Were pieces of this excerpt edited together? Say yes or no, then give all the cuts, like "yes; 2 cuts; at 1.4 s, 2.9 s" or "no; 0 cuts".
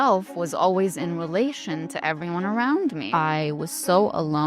yes; 1 cut; at 3.0 s